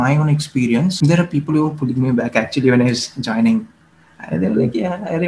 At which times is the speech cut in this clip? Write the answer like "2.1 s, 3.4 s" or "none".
1.0 s